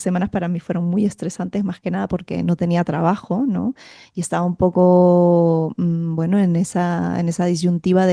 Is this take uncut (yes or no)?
yes